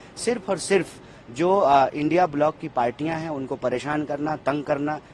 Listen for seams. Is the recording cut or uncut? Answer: uncut